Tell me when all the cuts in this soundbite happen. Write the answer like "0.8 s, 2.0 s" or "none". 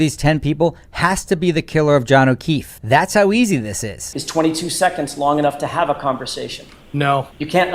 4.1 s